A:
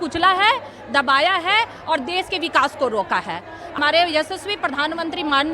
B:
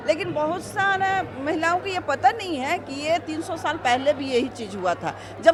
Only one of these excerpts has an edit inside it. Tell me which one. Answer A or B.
A